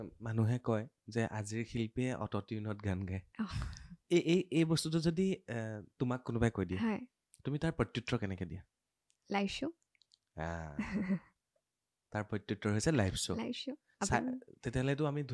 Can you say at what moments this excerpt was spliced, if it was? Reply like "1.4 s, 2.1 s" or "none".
none